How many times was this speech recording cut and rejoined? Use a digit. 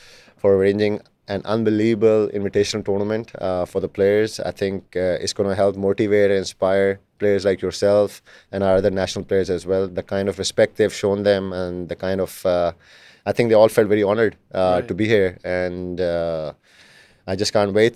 0